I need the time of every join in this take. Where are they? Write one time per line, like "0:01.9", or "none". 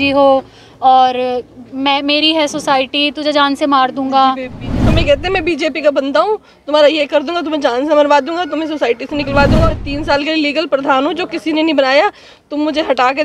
0:04.9
0:09.7